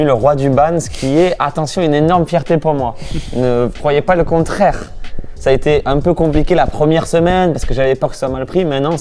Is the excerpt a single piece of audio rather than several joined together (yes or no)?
yes